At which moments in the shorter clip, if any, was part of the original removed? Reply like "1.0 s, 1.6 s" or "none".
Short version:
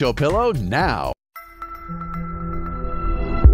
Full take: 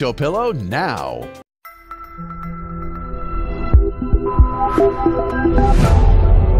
1.1 s